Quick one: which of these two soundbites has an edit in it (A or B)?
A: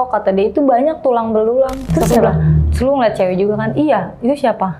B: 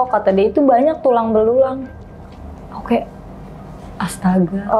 A